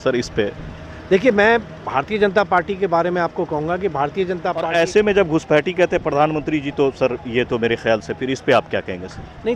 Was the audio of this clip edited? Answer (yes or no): yes